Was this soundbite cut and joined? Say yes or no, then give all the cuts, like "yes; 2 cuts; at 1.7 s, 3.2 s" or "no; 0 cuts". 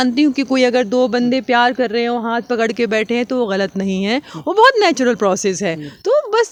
no; 0 cuts